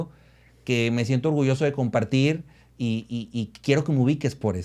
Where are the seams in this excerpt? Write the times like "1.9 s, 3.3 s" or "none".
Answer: none